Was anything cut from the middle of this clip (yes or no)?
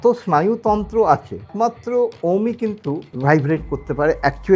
yes